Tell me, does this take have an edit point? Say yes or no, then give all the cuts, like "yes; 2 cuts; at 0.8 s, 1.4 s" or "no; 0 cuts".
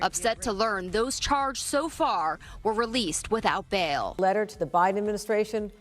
yes; 1 cut; at 4.1 s